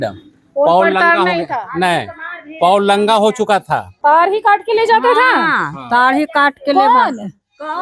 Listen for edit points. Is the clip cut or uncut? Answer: cut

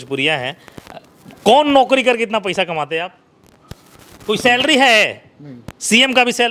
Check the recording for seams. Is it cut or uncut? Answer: uncut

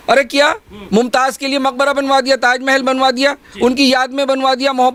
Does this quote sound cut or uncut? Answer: uncut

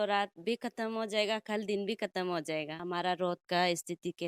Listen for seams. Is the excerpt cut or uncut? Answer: cut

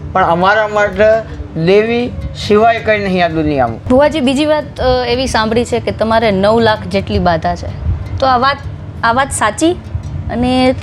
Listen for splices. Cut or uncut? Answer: cut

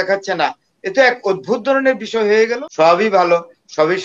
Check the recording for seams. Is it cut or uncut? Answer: cut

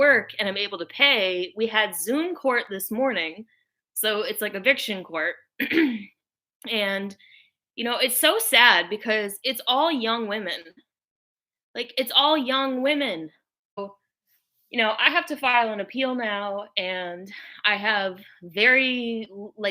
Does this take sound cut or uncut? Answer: cut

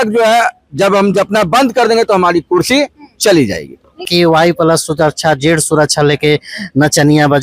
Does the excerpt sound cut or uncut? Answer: cut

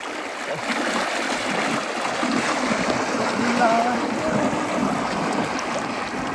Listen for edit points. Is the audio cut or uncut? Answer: uncut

